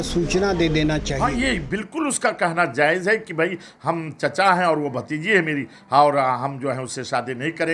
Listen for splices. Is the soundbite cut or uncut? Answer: cut